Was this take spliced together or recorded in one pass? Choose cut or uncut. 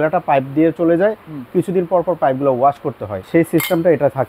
cut